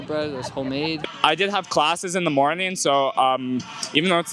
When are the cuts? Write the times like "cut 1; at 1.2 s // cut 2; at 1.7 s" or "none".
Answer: cut 1; at 1.1 s

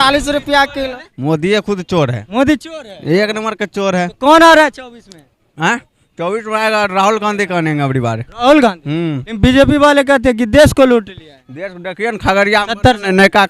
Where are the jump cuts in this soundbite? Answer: cut 1; at 1.1 s

